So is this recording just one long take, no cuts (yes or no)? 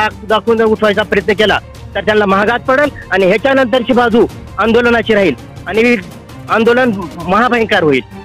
yes